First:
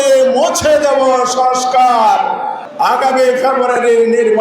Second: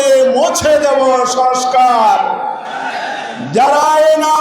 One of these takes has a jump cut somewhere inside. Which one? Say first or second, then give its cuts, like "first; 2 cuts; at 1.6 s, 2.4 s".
first; 1 cut; at 2.6 s